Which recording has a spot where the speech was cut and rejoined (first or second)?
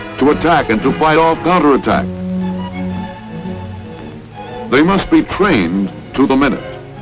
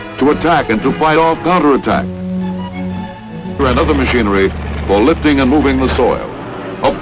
first